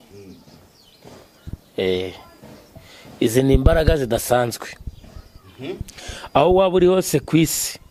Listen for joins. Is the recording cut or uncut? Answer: uncut